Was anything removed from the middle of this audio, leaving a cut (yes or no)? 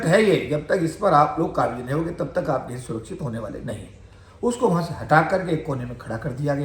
no